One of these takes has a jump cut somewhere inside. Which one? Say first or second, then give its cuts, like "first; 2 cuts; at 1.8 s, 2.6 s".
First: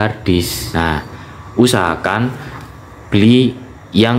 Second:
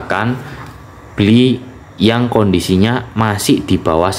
first; 1 cut; at 0.9 s